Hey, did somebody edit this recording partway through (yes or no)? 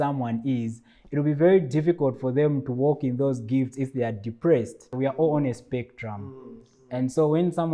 yes